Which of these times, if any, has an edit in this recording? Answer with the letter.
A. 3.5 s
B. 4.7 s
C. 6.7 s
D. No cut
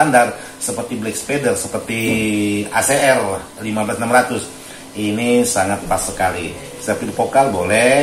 C